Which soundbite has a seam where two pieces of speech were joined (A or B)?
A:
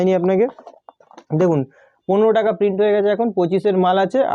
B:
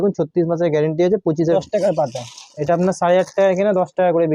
B